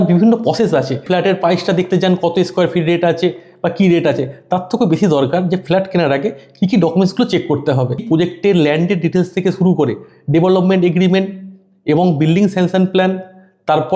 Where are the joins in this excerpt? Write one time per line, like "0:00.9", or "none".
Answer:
0:01.0
0:08.0